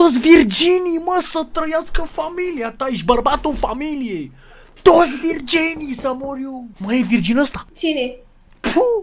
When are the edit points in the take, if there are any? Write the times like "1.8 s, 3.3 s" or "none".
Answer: 6.7 s, 7.6 s